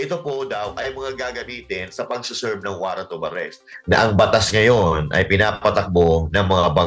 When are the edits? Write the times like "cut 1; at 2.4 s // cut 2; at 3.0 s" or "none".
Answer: cut 1; at 3.7 s